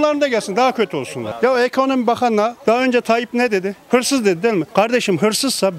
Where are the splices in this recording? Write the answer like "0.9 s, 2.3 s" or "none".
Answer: 2.6 s, 3.8 s